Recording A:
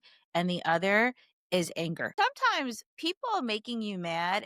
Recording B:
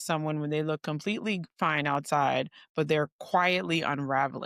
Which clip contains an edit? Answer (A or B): A